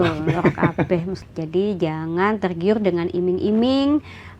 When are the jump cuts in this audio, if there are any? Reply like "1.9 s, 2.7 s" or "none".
1.1 s